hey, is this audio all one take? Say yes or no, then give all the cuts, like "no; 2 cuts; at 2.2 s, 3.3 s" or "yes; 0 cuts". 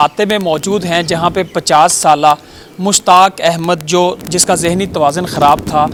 yes; 0 cuts